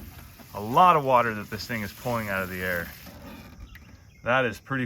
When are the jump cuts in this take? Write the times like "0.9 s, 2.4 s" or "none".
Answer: 3.1 s